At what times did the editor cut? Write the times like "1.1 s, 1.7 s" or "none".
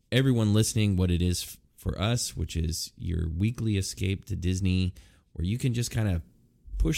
none